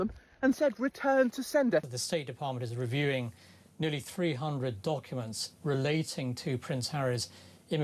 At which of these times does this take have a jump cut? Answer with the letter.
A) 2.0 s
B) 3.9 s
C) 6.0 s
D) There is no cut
A